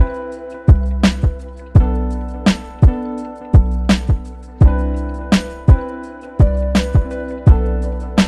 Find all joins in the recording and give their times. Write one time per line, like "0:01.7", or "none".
none